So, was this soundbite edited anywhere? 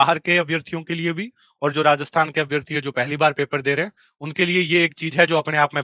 no; 0 cuts

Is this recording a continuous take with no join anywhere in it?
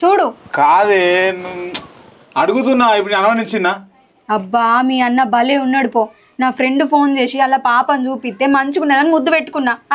yes; 0 cuts

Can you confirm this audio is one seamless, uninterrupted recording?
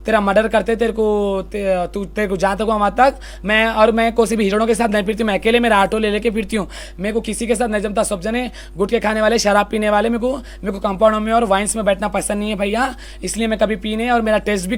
yes; 0 cuts

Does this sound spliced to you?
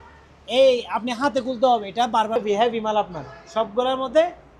yes; 1 cut; at 2.4 s

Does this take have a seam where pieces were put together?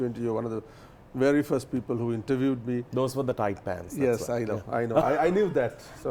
no; 0 cuts

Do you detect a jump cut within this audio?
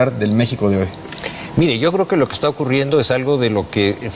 yes; 1 cut; at 1.9 s

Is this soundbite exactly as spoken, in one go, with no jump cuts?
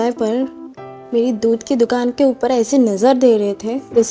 yes; 0 cuts

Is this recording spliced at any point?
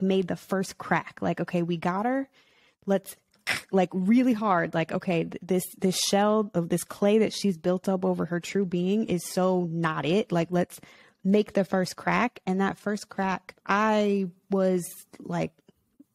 no; 0 cuts

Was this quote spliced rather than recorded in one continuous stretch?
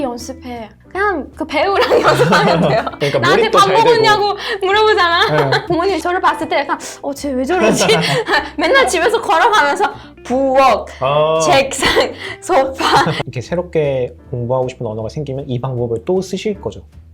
yes; 3 cuts; at 3.0 s, 5.6 s, 13.2 s

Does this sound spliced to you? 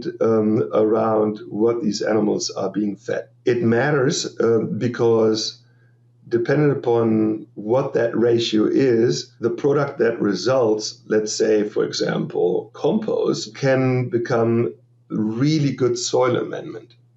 yes; 4 cuts; at 3.3 s, 7.5 s, 9.3 s, 13.5 s

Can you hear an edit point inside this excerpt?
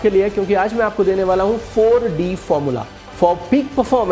yes; 1 cut; at 3.0 s

